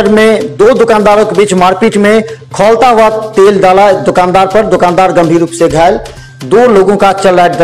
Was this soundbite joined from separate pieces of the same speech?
no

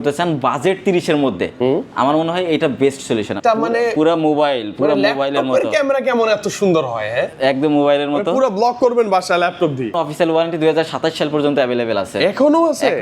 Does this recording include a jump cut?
yes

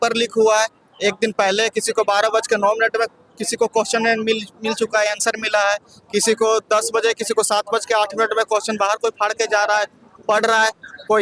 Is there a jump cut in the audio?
no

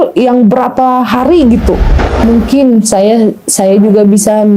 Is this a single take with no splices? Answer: no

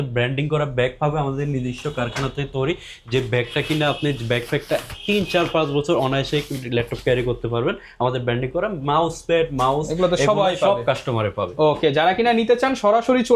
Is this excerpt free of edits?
yes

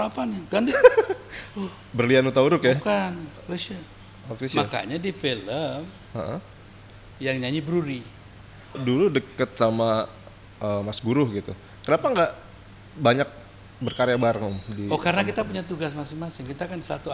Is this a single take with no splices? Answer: no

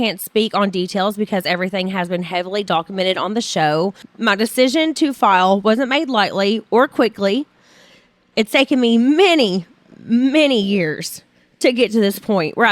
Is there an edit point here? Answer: yes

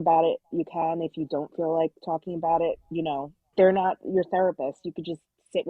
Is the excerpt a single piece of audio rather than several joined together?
yes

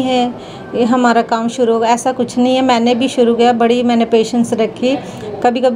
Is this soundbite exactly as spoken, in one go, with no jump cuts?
yes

